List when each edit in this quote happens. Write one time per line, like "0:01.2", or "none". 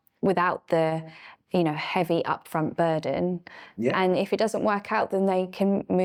none